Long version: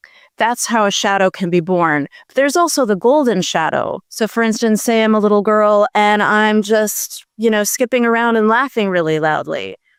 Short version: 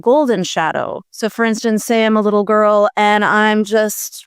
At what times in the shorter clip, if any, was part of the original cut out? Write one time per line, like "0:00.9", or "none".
none